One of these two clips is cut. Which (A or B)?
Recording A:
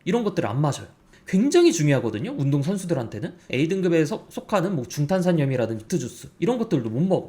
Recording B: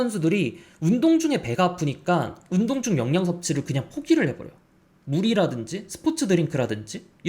A